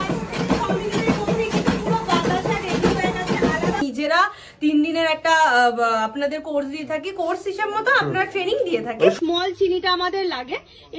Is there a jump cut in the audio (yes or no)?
yes